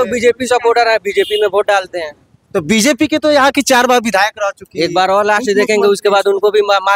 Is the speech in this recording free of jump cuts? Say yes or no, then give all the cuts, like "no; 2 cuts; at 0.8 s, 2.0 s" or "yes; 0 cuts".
yes; 0 cuts